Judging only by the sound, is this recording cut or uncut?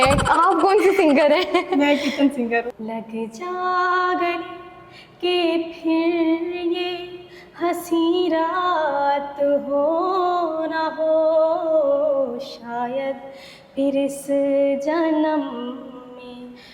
cut